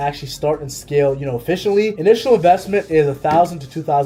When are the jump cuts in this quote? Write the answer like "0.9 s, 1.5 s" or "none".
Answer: none